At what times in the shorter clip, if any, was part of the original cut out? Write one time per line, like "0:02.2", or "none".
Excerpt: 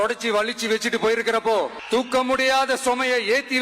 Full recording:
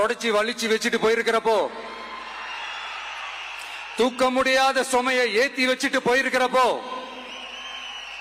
0:01.8